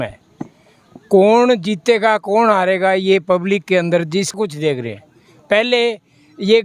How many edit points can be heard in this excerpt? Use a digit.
1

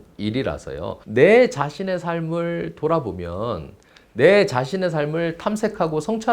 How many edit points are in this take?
1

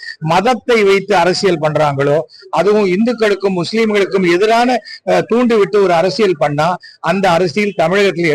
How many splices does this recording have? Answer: 0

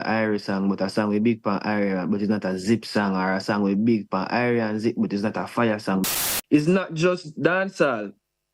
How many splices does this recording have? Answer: 1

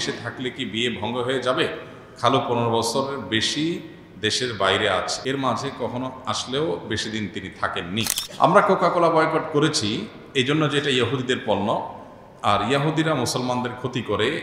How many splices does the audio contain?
2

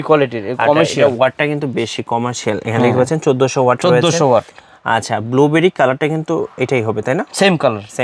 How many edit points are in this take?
0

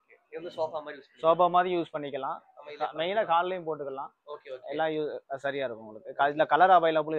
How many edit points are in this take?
0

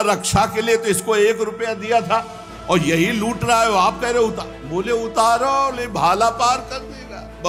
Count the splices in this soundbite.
0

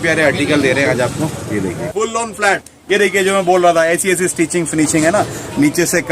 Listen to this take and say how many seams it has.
1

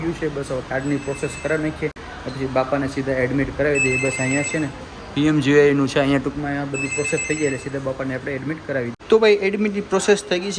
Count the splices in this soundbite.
0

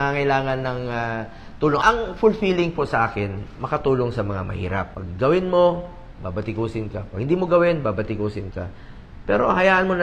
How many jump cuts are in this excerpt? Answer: 2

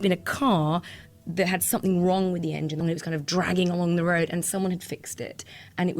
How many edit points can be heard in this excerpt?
1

